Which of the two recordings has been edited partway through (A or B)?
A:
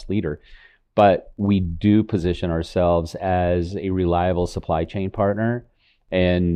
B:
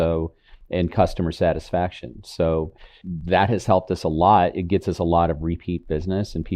B